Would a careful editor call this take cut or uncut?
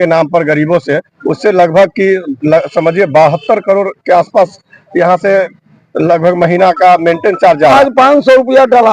cut